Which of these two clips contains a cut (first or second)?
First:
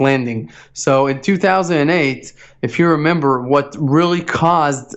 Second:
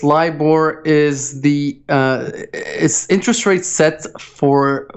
first